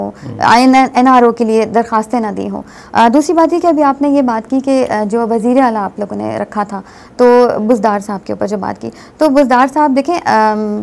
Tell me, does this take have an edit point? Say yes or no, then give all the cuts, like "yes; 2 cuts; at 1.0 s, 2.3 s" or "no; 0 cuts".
no; 0 cuts